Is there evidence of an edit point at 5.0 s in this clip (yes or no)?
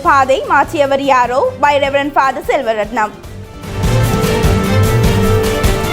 no